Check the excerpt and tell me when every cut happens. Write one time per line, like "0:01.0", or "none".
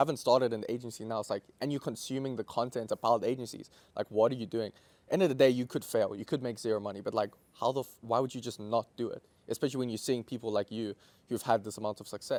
none

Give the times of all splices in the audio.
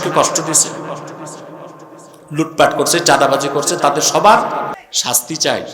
0:04.8

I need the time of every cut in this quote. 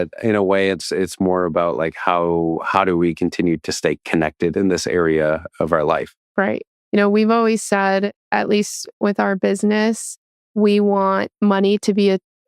0:06.2

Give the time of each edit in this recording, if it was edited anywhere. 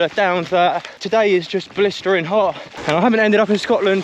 0:01.0
0:02.7

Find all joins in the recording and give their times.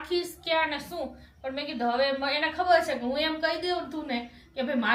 none

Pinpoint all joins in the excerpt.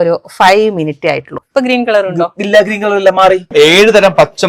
0:01.4
0:03.5

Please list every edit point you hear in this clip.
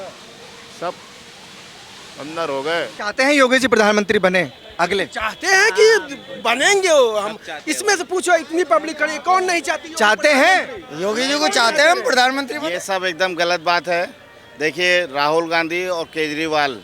0:03.0

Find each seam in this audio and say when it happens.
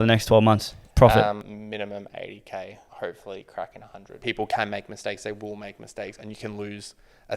0:01.5
0:02.8
0:04.1

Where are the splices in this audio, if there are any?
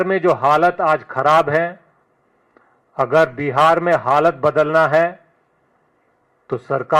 none

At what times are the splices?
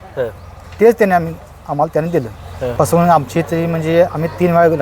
0:02.7

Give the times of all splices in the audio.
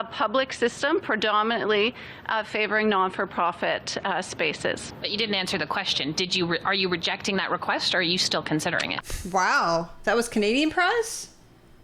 0:05.0
0:09.0

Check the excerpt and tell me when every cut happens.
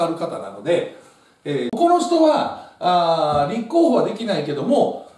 0:01.7

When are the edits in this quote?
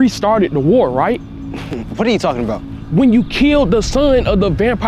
0:01.4

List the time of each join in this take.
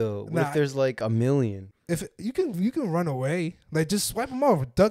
0:01.7

